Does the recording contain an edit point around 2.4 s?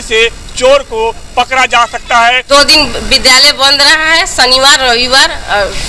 yes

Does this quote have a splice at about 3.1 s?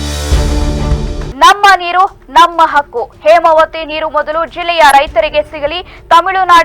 no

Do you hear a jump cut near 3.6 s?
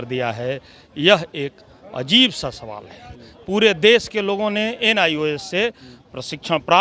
no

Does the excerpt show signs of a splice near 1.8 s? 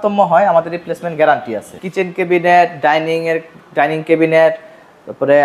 yes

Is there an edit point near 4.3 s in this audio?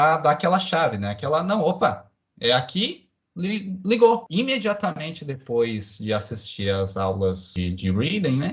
yes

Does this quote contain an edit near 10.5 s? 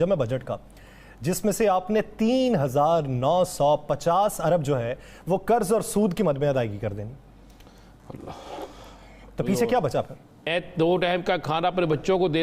yes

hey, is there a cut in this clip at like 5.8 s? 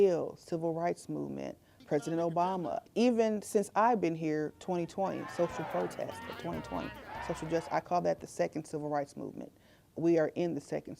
no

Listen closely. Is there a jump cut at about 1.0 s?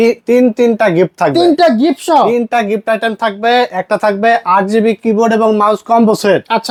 no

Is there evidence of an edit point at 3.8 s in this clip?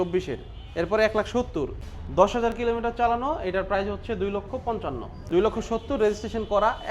no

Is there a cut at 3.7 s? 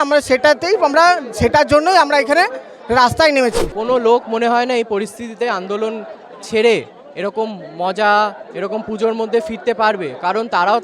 yes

